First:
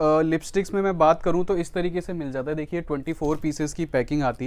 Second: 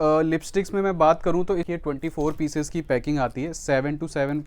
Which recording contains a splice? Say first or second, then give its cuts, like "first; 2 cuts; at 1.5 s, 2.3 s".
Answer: second; 1 cut; at 1.7 s